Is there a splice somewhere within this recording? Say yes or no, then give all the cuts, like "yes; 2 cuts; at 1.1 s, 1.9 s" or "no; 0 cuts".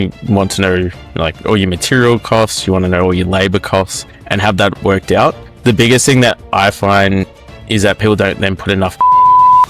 no; 0 cuts